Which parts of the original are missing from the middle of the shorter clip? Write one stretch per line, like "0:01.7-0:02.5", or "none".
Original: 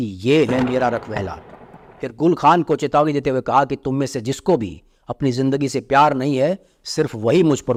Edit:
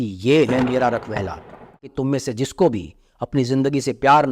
0:01.9-0:03.8